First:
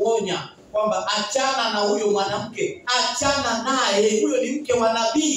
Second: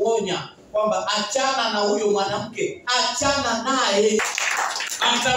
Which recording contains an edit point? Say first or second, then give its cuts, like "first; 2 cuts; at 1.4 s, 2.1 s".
second; 1 cut; at 4.2 s